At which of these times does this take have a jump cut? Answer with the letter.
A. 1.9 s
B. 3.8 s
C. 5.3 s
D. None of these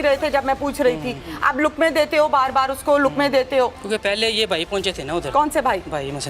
B